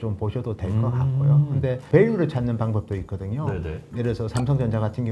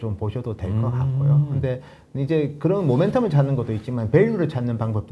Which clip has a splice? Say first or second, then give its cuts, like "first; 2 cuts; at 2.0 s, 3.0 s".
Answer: first; 2 cuts; at 1.8 s, 3.8 s